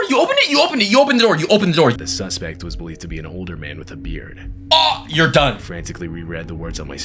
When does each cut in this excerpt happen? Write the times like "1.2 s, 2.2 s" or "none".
2.0 s